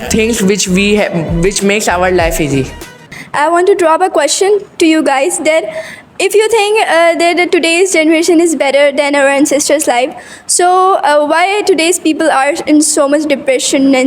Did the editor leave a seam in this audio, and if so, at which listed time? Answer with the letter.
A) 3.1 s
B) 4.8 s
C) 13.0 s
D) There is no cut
A